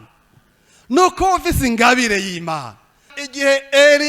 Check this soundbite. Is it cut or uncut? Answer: cut